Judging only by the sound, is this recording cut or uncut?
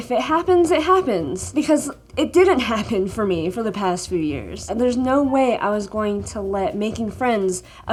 uncut